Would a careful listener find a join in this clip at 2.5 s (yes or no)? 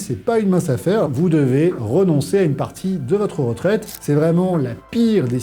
no